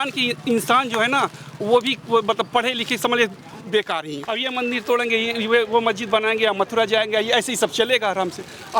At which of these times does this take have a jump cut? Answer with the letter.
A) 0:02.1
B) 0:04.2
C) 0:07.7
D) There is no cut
B